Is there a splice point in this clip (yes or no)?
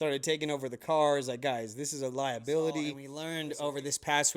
yes